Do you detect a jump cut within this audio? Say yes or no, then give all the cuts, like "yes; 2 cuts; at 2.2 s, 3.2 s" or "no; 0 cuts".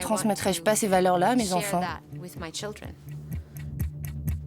no; 0 cuts